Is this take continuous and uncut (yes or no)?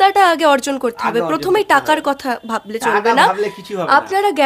yes